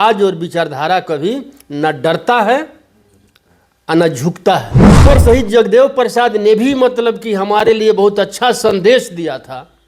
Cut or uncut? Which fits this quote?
cut